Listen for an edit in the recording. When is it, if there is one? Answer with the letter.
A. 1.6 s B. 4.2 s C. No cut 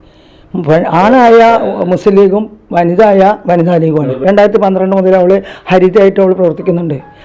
B